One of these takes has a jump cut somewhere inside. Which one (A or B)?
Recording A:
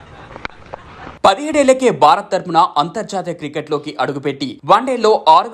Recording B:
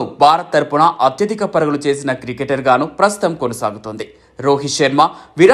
A